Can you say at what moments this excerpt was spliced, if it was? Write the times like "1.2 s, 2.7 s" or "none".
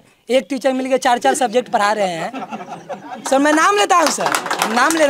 none